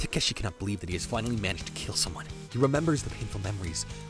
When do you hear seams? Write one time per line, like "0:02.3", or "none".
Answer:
0:02.4